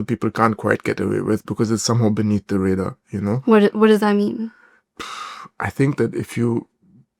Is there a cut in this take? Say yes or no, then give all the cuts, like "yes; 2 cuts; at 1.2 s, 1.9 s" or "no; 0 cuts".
no; 0 cuts